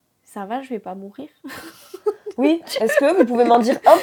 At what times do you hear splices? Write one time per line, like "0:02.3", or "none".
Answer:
none

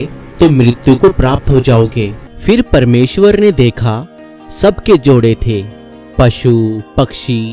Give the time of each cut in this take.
0:02.2

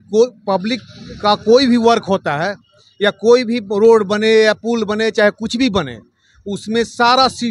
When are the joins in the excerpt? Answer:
none

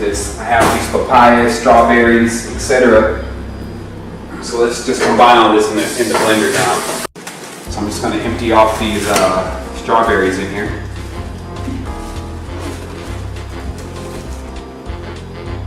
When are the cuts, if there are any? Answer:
0:03.7

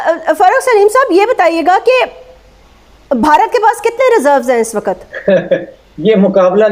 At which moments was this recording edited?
0:05.1

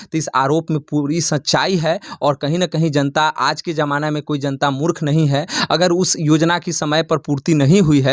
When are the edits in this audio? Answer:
0:05.5

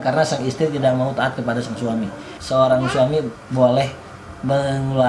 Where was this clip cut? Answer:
0:02.4

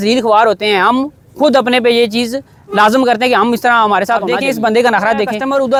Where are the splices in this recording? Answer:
none

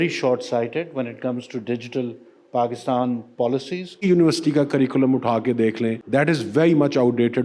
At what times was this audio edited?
0:04.1
0:06.0

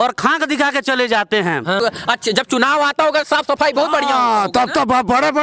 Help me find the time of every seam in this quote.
0:01.8

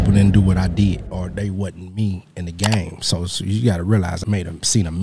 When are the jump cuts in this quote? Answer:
0:01.1
0:04.2

